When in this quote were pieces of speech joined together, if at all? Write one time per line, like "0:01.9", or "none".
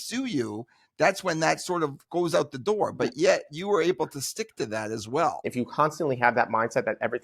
0:05.5